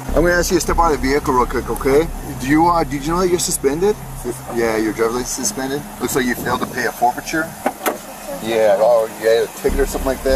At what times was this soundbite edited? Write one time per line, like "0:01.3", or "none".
none